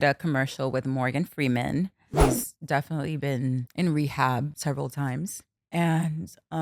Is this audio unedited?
no; 4 cuts; at 2.1 s, 3.7 s, 4.5 s, 5.5 s

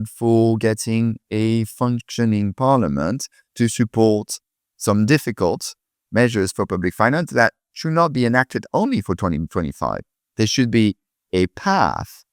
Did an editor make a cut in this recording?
no; 0 cuts

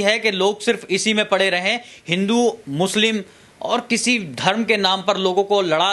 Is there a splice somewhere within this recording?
no; 0 cuts

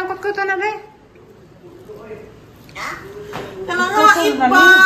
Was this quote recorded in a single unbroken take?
yes; 0 cuts

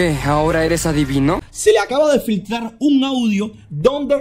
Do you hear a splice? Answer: yes; 1 cut; at 1.4 s

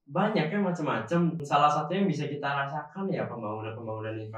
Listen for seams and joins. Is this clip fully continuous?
no; 1 cut; at 1.4 s

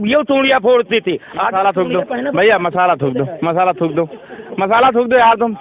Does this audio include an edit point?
no; 0 cuts

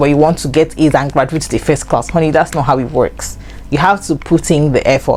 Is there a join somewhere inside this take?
no; 0 cuts

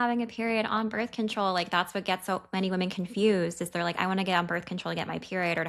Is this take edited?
no; 0 cuts

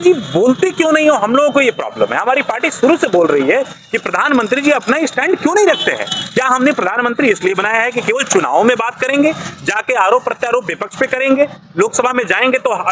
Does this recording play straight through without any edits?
yes; 0 cuts

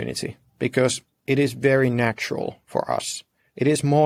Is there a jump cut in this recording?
no; 0 cuts

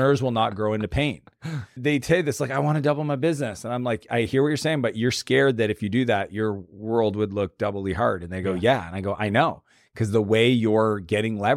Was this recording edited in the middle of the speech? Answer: yes; 1 cut; at 1.7 s

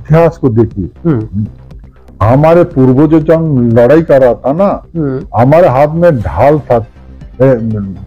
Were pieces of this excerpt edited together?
no; 0 cuts

